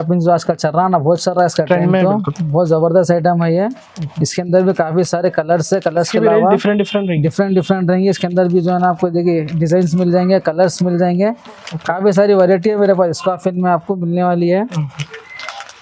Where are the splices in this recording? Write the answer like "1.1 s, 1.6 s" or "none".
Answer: none